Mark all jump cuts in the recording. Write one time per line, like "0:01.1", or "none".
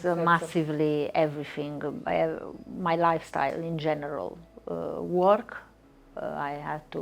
none